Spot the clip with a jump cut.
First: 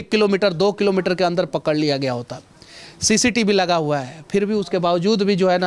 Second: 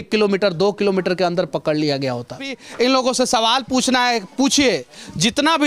second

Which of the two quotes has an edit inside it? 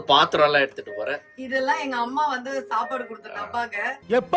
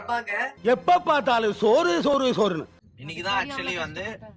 second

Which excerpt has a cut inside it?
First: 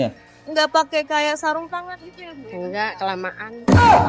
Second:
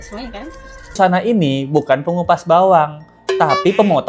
second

